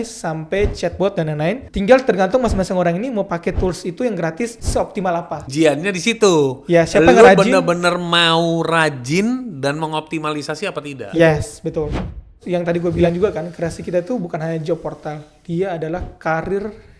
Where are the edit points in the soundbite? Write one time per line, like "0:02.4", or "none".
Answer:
0:01.7
0:04.8
0:12.4

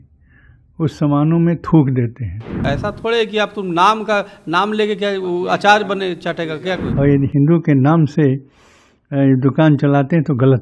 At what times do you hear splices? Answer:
0:02.6
0:06.9

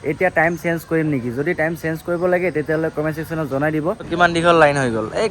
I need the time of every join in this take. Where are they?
0:04.1

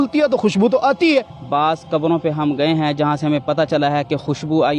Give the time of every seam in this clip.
0:01.4

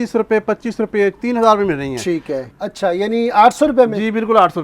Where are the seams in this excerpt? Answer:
0:02.4

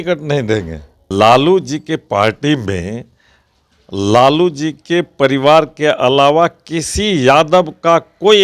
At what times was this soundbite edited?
0:01.0

